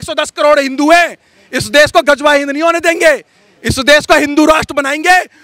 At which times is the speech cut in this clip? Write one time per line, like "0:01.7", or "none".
none